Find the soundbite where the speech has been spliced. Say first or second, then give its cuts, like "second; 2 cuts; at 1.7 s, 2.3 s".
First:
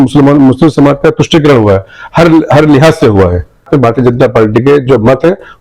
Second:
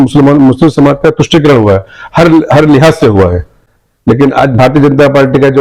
first; 1 cut; at 3.7 s